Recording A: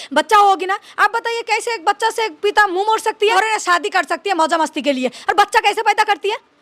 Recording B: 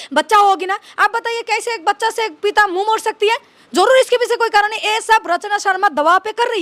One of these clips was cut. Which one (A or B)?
A